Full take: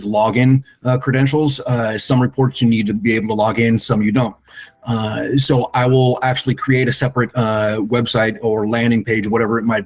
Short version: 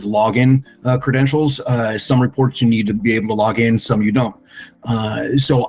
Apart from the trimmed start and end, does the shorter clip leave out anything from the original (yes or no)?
no